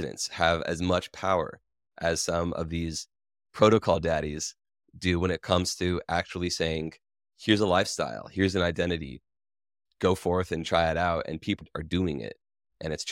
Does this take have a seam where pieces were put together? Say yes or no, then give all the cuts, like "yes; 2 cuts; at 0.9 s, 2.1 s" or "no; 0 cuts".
yes; 1 cut; at 11.6 s